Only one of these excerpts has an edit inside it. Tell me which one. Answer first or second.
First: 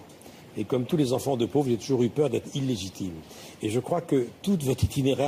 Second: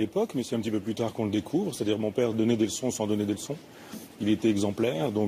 second